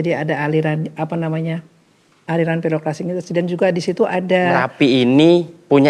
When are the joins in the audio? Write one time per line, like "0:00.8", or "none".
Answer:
0:04.7